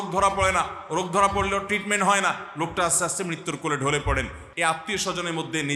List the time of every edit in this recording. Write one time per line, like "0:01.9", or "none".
0:04.4